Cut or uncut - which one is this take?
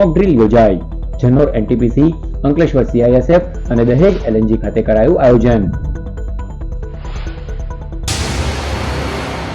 cut